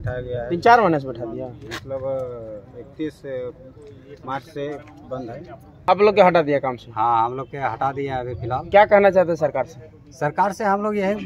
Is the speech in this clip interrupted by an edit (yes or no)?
yes